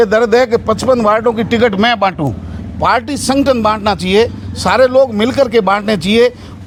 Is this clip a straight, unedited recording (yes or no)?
yes